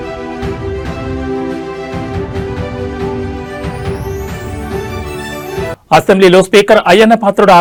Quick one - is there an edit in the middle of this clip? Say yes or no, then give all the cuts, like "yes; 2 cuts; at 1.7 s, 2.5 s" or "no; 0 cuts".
no; 0 cuts